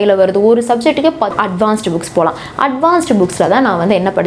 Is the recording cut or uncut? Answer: cut